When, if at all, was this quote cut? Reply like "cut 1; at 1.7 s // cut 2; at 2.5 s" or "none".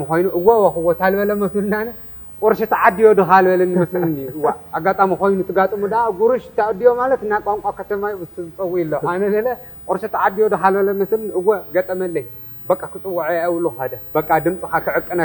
cut 1; at 14.0 s